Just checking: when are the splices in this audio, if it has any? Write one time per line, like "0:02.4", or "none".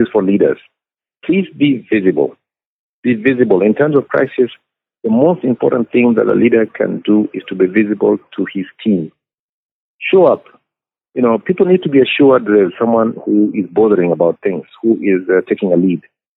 0:01.0